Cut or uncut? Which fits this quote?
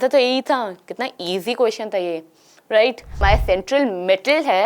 cut